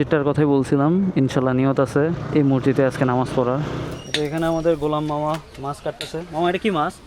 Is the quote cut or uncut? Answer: cut